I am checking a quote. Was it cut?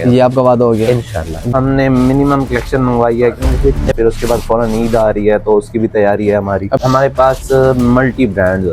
yes; 3 cuts; at 1.5 s, 3.9 s, 6.8 s

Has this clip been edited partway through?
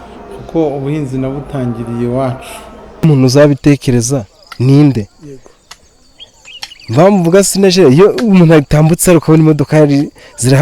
yes; 1 cut; at 3.0 s

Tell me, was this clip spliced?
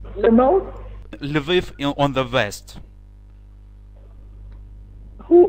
yes; 1 cut; at 1.5 s

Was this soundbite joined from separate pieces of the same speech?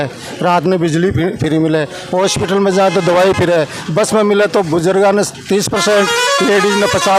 no; 0 cuts

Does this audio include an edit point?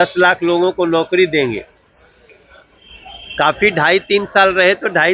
no; 0 cuts

